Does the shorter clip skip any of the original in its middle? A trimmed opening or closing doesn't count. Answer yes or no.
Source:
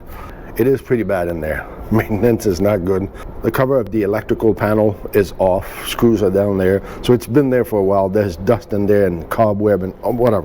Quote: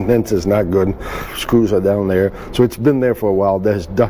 yes